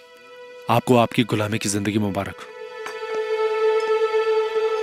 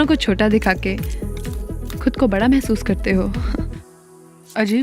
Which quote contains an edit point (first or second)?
second